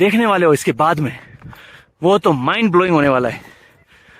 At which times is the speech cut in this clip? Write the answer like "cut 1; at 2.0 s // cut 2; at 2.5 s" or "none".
none